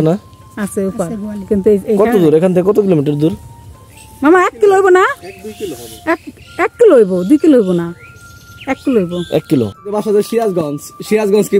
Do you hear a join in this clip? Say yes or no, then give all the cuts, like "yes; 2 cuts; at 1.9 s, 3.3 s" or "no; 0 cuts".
yes; 1 cut; at 9.7 s